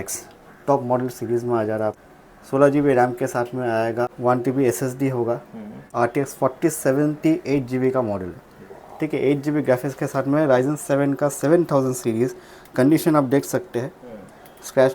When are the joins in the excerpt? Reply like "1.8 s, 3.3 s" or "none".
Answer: 2.0 s, 4.1 s, 5.8 s